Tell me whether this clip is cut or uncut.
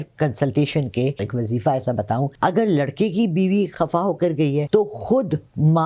cut